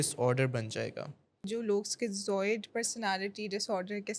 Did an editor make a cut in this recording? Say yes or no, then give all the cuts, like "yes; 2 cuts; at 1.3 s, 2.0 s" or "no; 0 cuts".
yes; 1 cut; at 1.5 s